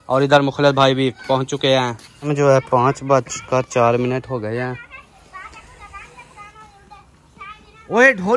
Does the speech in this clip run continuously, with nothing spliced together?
no; 1 cut; at 2.3 s

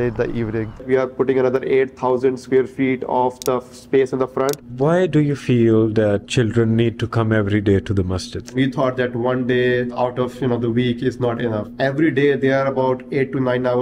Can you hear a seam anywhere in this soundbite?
yes; 6 cuts; at 0.8 s, 4.6 s, 6.3 s, 8.5 s, 10.0 s, 11.7 s

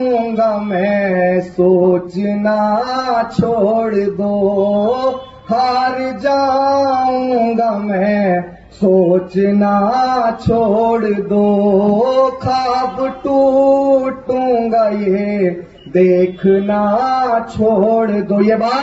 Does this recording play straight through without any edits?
yes; 0 cuts

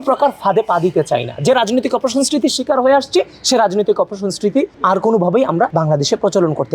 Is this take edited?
no; 0 cuts

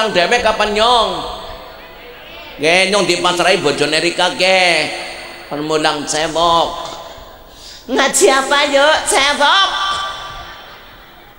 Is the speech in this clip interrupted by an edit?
no; 0 cuts

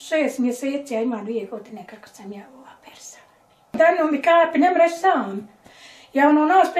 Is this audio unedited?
no; 1 cut; at 3.8 s

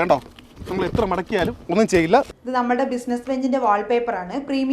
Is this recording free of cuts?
no; 1 cut; at 2.3 s

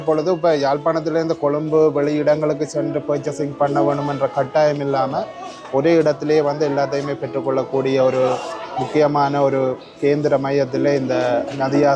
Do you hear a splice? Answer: no; 0 cuts

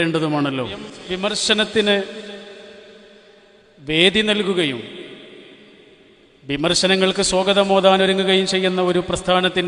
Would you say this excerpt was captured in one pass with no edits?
no; 1 cut; at 1.0 s

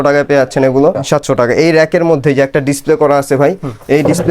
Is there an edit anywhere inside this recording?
yes; 1 cut; at 1.0 s

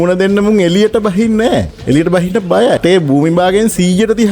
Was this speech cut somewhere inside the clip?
yes; 1 cut; at 2.8 s

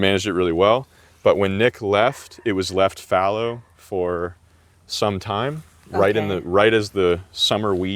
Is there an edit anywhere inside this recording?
no; 0 cuts

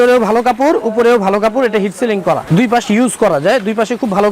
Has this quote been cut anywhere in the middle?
yes; 1 cut; at 2.4 s

